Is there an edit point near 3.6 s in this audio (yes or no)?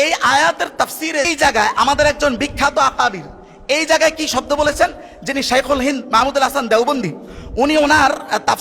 no